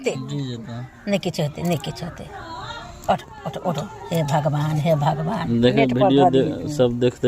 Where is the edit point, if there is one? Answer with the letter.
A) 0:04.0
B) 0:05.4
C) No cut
B